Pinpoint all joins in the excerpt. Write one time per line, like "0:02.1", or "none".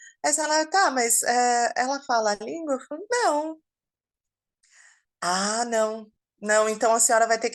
none